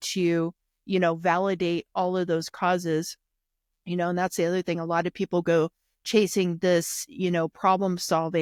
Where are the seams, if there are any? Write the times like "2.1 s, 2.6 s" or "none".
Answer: none